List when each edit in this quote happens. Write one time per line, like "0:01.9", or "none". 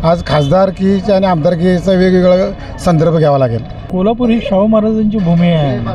0:03.9